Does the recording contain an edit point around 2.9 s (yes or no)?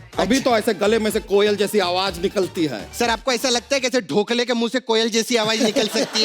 yes